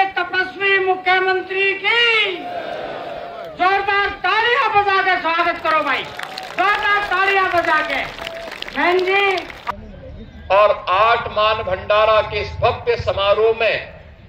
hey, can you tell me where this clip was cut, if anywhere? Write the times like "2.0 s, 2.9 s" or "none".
9.6 s